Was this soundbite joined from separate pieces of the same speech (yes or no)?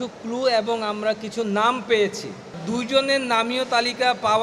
yes